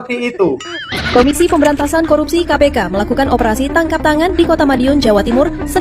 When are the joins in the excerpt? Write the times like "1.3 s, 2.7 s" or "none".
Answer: 1.0 s